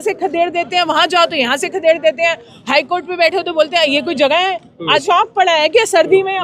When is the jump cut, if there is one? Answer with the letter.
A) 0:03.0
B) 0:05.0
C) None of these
B